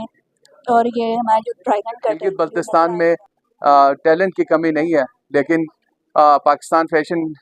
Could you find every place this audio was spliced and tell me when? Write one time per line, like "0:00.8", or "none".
0:02.3